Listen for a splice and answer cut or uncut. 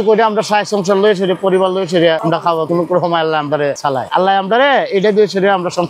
uncut